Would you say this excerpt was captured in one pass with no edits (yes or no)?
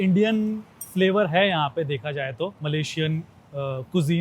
no